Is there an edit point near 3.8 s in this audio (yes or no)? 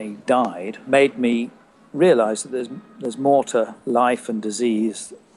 yes